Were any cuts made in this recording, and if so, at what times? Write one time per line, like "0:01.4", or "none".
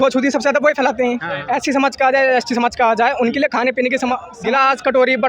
0:01.3
0:04.3